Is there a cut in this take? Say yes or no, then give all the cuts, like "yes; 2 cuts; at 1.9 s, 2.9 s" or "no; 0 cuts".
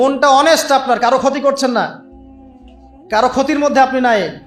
no; 0 cuts